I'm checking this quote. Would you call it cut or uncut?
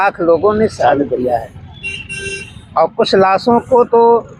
uncut